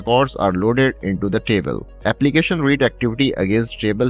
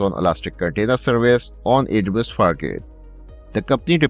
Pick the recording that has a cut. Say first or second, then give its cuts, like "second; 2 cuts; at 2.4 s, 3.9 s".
first; 1 cut; at 1.8 s